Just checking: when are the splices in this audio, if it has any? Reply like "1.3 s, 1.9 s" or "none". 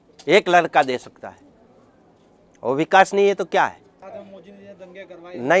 4.0 s